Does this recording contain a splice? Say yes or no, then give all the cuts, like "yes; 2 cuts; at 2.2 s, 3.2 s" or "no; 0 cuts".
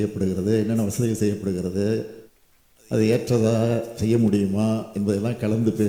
no; 0 cuts